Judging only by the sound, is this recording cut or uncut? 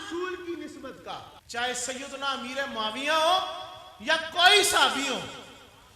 cut